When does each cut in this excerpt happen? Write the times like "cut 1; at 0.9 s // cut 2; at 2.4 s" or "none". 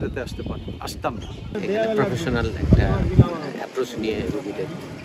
cut 1; at 1.5 s